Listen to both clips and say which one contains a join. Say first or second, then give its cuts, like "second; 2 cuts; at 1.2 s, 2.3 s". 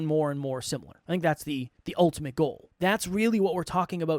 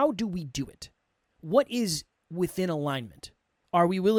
first; 3 cuts; at 0.9 s, 1.8 s, 2.6 s